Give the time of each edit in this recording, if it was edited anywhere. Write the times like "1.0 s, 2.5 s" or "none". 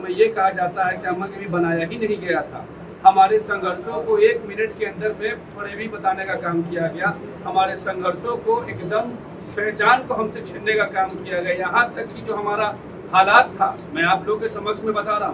none